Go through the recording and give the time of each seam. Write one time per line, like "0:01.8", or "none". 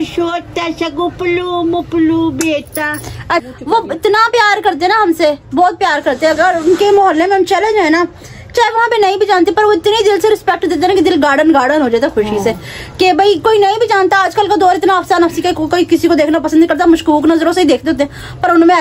0:03.5